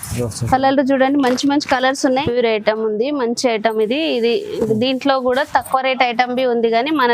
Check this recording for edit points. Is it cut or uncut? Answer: cut